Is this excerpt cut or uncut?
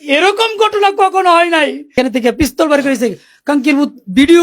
cut